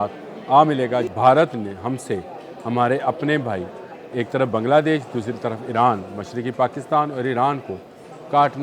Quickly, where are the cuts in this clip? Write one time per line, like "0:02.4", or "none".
0:01.1